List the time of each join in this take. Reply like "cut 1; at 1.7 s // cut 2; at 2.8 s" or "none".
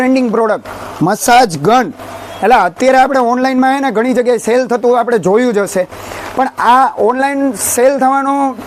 none